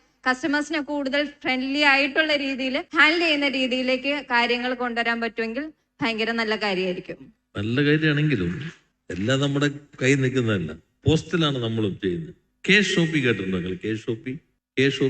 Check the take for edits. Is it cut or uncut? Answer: cut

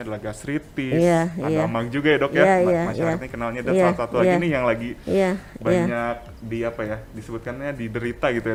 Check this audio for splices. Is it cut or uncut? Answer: uncut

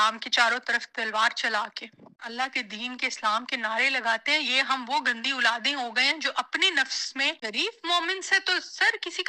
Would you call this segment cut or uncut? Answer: cut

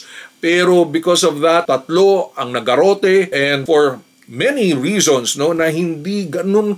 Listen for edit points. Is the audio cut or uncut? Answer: uncut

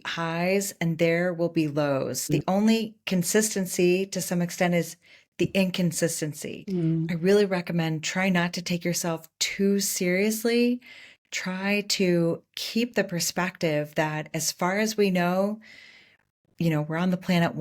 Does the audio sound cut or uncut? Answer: cut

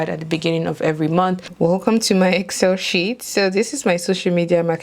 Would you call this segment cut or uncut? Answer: cut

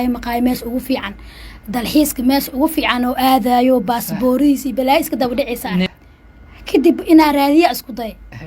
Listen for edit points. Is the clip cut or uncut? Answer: cut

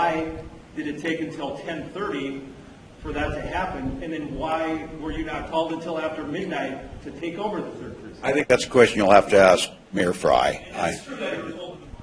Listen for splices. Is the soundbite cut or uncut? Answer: cut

